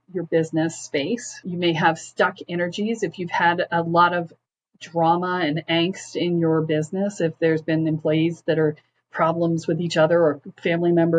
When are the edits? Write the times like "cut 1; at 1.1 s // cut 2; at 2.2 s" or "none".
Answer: cut 1; at 1.4 s